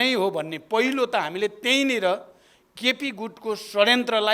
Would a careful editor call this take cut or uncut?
uncut